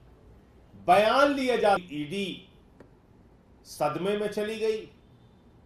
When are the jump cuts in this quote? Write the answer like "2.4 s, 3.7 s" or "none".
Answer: 1.8 s